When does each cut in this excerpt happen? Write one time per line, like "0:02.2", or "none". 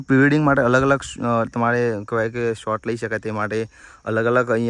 none